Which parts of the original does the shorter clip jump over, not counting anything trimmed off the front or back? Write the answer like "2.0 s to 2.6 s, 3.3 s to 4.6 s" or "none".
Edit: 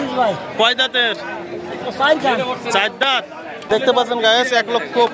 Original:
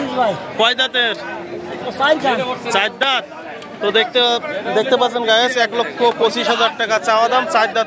3.6 s to 4.7 s